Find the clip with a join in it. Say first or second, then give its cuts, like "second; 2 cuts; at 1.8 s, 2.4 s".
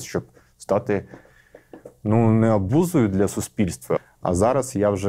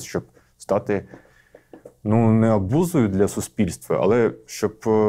first; 1 cut; at 4.0 s